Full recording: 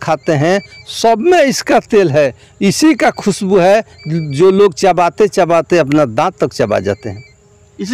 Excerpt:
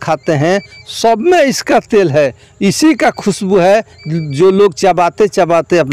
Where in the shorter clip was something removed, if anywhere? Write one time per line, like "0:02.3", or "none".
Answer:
none